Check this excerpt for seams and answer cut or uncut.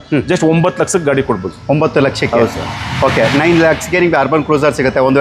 uncut